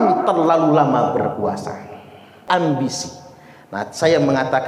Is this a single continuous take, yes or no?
no